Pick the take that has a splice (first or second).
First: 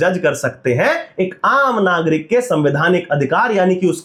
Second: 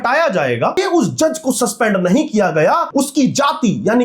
second